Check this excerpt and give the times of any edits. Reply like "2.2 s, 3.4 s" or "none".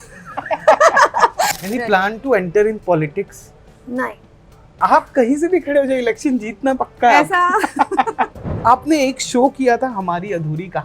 1.5 s, 4.7 s, 8.5 s